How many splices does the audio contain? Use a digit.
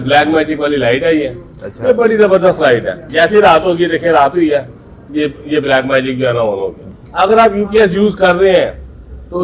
2